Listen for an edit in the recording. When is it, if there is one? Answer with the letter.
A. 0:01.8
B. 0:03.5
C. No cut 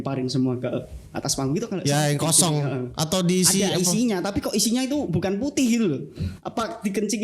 A